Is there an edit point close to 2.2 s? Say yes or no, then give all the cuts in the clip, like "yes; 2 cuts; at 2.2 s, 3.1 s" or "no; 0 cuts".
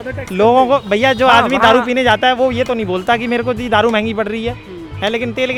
no; 0 cuts